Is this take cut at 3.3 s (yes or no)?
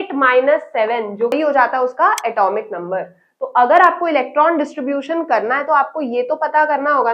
no